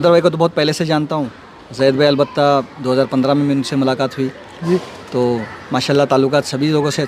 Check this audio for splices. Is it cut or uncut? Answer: uncut